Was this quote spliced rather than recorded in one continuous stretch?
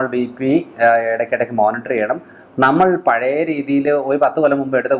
no; 0 cuts

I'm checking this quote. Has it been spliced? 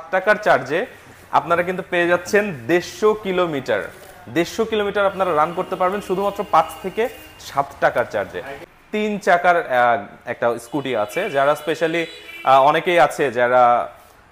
yes; 1 cut; at 8.6 s

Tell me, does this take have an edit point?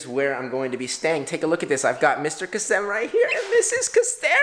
no; 0 cuts

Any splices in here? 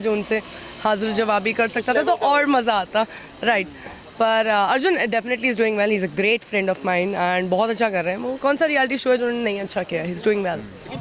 no; 0 cuts

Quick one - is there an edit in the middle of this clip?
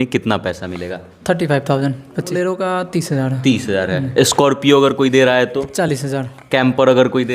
yes; 1 cut; at 2.3 s

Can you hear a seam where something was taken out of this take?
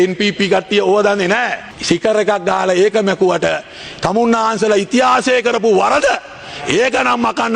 yes; 1 cut; at 1.7 s

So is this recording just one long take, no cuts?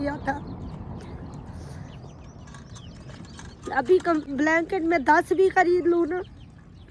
yes; 0 cuts

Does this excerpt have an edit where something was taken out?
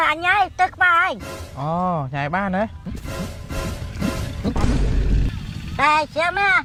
no; 0 cuts

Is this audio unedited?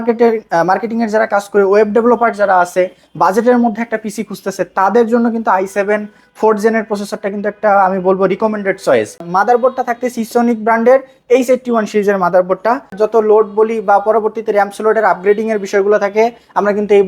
no; 2 cuts; at 9.2 s, 12.9 s

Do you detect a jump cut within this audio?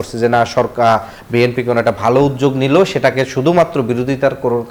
no; 0 cuts

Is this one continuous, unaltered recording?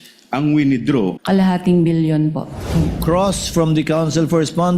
no; 2 cuts; at 1.2 s, 2.8 s

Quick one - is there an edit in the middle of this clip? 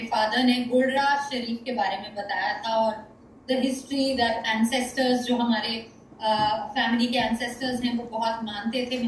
no; 0 cuts

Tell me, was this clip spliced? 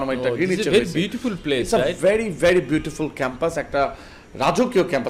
no; 0 cuts

